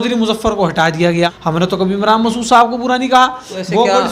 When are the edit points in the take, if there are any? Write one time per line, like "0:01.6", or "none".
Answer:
0:01.4